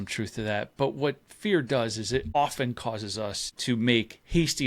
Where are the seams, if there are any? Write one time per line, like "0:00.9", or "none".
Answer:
0:02.3
0:03.5